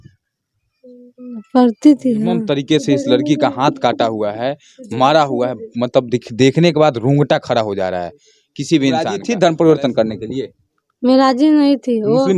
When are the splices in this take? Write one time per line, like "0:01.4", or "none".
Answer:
0:02.4
0:09.2